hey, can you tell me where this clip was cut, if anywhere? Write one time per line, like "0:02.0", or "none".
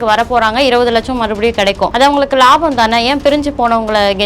0:01.9